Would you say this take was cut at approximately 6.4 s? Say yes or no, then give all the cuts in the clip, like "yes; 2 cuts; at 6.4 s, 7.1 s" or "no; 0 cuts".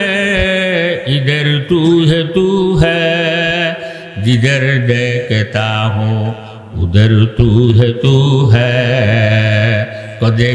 no; 0 cuts